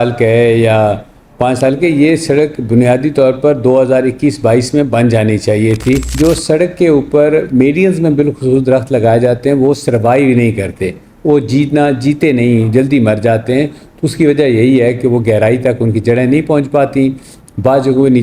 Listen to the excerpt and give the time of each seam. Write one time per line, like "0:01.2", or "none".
0:06.1

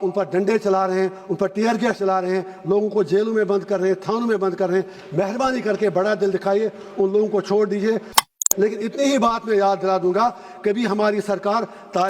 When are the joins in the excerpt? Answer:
0:08.3

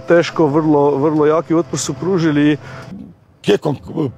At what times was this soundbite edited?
0:02.7

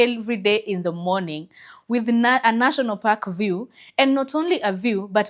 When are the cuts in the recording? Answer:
none

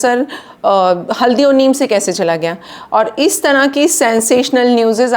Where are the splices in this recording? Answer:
none

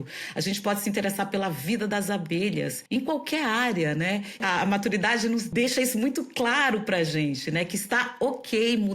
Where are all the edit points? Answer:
0:02.8
0:04.4
0:05.5

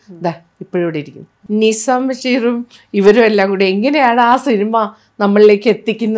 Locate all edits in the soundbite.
0:01.3

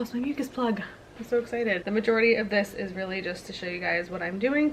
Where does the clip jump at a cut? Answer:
0:01.8

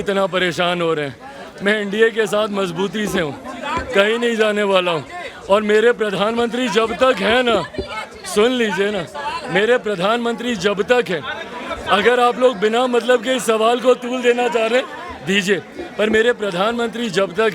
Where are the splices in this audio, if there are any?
none

